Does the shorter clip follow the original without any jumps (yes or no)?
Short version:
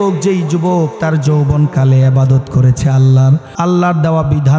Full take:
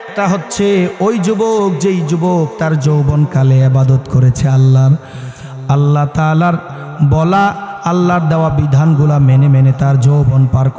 no